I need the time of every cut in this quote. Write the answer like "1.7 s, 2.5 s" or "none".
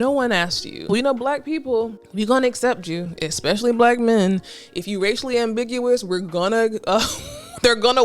0.9 s, 2.0 s